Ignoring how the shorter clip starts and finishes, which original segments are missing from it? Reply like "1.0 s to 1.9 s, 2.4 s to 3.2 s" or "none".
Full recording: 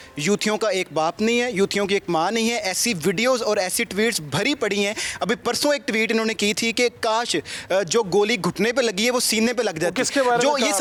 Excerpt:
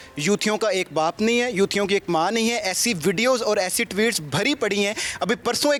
none